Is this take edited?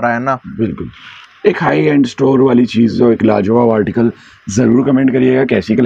no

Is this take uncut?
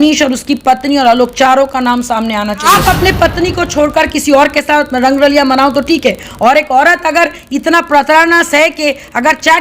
no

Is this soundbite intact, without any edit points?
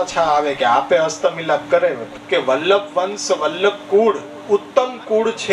no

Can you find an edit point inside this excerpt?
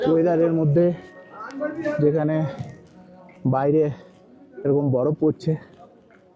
no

